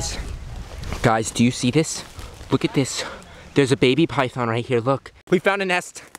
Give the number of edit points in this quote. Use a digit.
1